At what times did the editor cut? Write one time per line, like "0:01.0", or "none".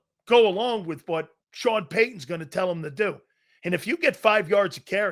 0:01.4